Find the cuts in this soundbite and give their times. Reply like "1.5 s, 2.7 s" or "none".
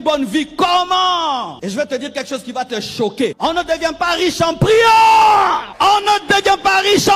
1.5 s, 3.4 s, 5.7 s